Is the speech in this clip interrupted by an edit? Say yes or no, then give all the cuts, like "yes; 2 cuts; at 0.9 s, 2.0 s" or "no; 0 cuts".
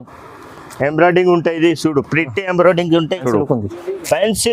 yes; 1 cut; at 3.2 s